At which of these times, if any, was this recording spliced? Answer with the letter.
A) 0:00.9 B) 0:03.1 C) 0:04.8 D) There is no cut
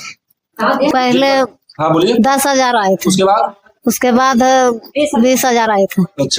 A